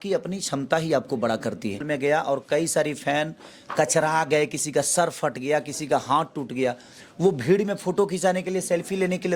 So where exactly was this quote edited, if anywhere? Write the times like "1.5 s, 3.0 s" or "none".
1.9 s